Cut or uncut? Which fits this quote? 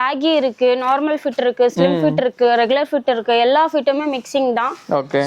uncut